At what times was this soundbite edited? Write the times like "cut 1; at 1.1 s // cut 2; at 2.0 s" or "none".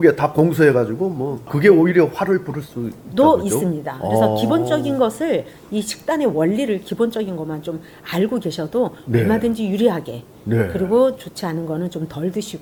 none